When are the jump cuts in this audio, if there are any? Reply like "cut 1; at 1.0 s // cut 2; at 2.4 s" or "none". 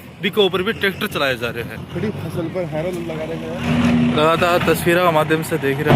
cut 1; at 3.7 s